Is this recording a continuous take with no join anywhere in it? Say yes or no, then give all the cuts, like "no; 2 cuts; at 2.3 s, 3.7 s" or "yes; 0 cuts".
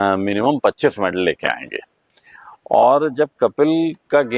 yes; 0 cuts